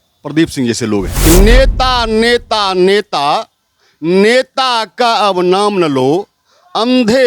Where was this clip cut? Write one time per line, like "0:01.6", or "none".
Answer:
0:01.1